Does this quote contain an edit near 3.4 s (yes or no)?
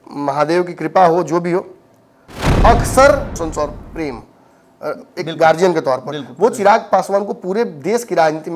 yes